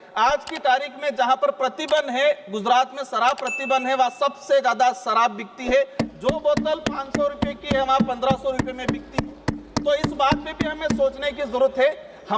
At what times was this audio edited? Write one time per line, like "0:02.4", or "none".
none